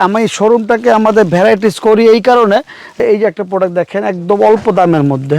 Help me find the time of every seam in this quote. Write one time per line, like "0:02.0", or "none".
0:03.0